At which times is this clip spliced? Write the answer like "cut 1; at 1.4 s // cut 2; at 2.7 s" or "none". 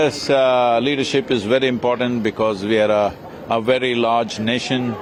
none